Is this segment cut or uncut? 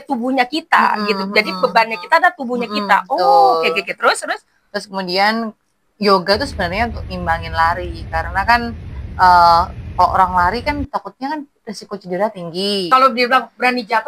cut